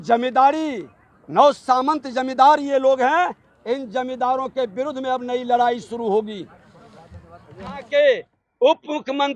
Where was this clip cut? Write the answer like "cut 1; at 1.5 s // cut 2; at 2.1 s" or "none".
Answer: cut 1; at 7.8 s